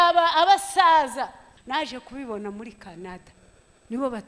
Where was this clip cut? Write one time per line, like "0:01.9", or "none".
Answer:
0:01.5